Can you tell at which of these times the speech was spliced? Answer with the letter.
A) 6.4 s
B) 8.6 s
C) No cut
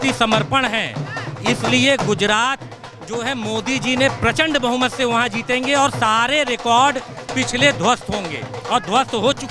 C